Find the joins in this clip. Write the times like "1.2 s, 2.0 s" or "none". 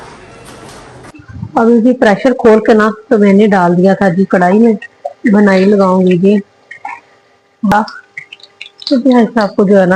1.2 s, 7.7 s